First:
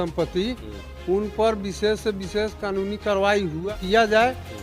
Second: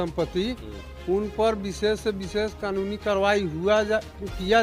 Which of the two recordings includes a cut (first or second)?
first